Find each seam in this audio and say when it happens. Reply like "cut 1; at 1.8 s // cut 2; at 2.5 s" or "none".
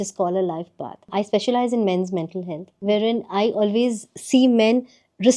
cut 1; at 1.1 s // cut 2; at 2.6 s